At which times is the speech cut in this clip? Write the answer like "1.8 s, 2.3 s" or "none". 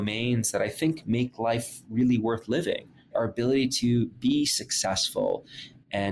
3.1 s, 4.2 s